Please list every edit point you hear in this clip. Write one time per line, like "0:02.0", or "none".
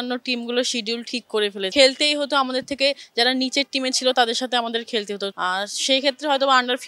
0:01.7
0:05.3